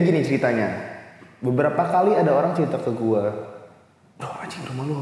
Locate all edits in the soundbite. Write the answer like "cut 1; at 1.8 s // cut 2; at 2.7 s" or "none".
none